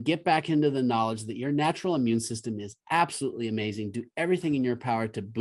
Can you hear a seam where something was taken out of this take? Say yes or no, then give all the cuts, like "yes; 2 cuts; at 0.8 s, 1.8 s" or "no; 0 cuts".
no; 0 cuts